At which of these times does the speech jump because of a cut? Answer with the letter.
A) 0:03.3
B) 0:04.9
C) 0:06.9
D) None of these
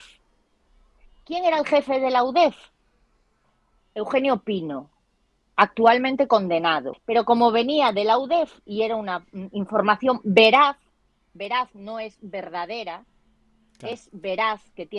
C